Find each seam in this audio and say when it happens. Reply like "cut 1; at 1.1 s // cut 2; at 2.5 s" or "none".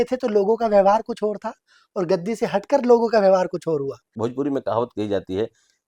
cut 1; at 4.0 s